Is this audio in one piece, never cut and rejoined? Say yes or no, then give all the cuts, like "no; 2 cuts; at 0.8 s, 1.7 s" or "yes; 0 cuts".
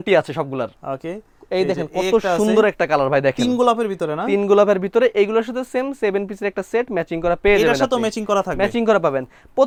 yes; 0 cuts